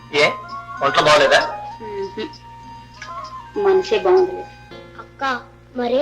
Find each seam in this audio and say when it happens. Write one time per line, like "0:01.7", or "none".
0:04.7